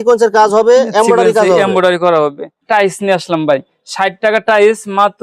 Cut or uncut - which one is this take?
cut